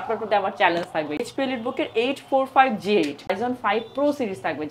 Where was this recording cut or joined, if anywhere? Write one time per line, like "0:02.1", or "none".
0:01.2
0:03.4